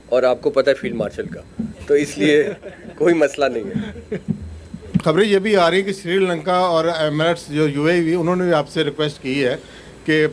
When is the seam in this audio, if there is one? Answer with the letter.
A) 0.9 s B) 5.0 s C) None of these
B